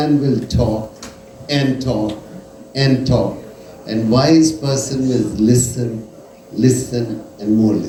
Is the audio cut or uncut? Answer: uncut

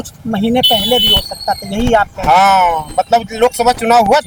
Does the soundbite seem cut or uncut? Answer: uncut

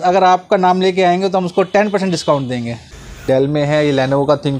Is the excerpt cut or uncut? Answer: cut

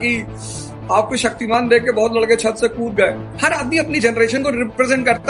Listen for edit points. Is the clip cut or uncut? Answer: cut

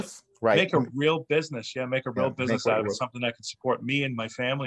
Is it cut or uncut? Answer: uncut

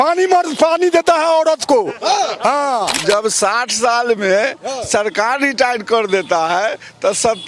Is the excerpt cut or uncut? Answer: cut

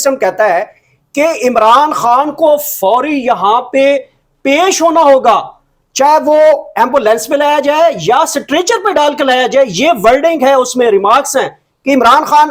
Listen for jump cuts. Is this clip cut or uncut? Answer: uncut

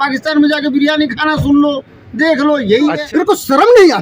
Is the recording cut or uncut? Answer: cut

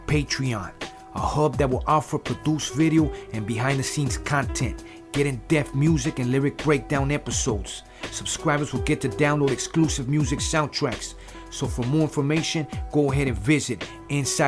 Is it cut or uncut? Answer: uncut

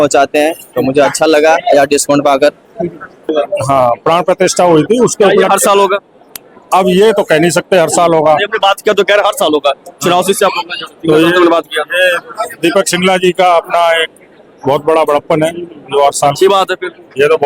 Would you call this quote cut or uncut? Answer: cut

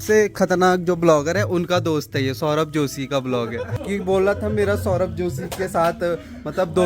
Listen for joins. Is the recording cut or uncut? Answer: cut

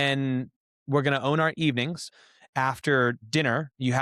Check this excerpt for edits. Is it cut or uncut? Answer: cut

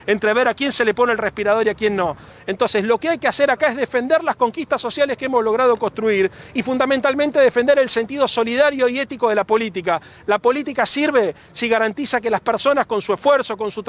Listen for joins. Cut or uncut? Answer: cut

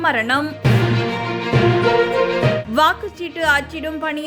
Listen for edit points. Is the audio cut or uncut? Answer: uncut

